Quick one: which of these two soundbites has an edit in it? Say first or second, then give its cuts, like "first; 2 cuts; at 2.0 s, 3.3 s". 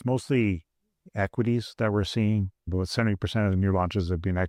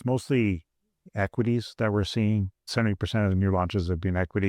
second; 1 cut; at 2.7 s